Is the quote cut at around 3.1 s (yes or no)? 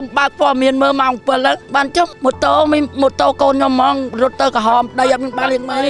no